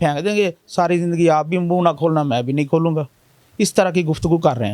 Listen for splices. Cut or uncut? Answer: uncut